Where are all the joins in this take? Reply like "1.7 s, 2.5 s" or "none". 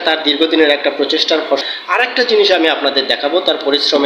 1.6 s